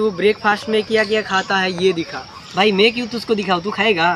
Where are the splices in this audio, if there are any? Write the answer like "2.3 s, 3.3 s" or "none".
none

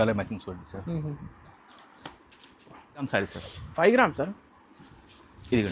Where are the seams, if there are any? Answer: 3.1 s

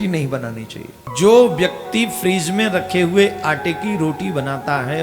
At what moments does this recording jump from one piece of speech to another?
1.0 s

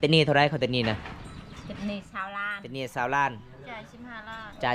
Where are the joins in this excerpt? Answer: none

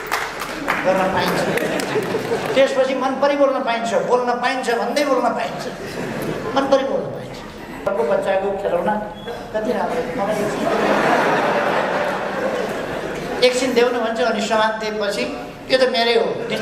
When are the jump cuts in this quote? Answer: 7.9 s

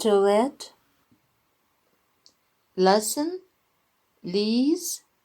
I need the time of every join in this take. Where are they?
1.1 s

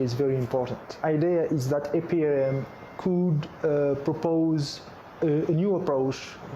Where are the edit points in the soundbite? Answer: 1.0 s

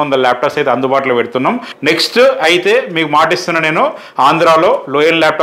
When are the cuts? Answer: 1.7 s

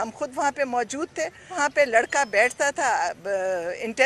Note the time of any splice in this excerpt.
1.5 s

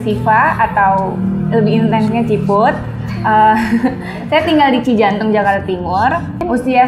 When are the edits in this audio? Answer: none

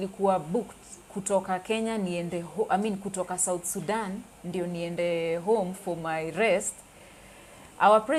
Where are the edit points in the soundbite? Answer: none

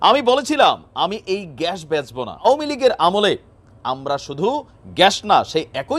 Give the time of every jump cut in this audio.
2.5 s

